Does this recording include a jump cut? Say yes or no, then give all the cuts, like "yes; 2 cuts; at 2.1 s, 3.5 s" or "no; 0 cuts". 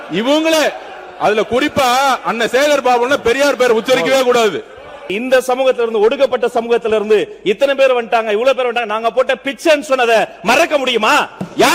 yes; 1 cut; at 5.1 s